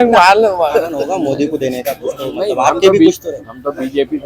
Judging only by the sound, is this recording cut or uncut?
cut